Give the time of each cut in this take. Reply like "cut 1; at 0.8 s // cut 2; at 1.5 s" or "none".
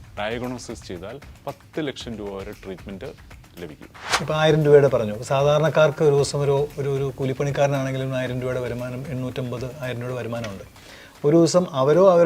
cut 1; at 4.1 s